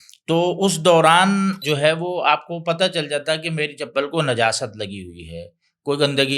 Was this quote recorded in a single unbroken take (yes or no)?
no